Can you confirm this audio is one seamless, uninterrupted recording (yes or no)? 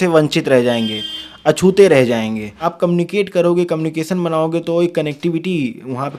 no